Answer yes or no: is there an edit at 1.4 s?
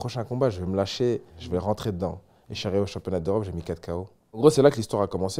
yes